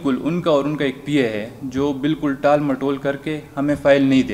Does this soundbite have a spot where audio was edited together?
no; 0 cuts

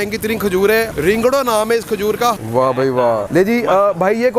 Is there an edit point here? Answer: yes; 3 cuts; at 0.9 s, 2.4 s, 3.3 s

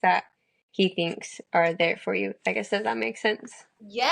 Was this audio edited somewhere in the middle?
no; 0 cuts

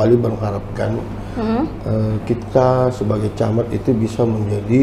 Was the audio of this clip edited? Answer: no; 0 cuts

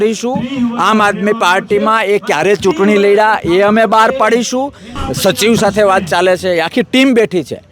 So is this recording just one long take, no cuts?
no; 1 cut; at 5.0 s

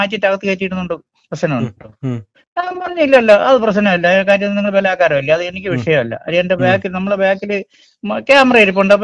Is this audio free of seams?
yes; 0 cuts

